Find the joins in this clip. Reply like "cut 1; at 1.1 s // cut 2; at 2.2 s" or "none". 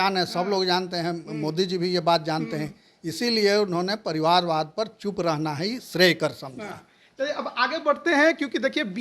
none